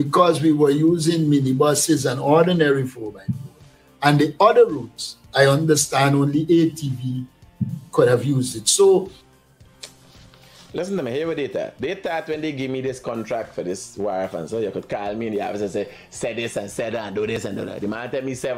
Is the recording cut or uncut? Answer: cut